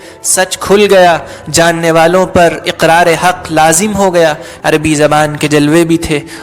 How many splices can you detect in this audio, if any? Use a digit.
1